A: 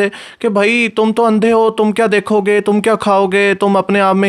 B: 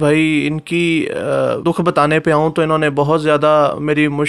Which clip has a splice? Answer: B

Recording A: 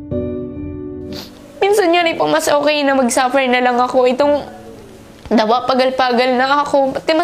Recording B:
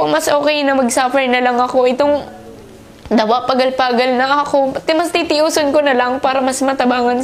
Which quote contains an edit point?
A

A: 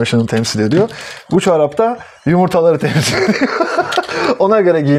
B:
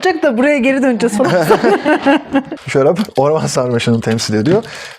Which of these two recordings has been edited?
B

